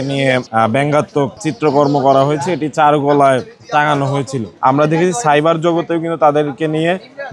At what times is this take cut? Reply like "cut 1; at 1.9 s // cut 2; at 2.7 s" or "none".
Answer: cut 1; at 1.5 s // cut 2; at 4.5 s